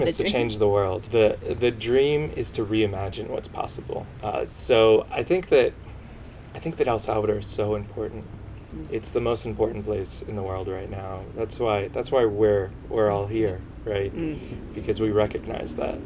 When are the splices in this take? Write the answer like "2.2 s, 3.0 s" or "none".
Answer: 1.0 s, 4.1 s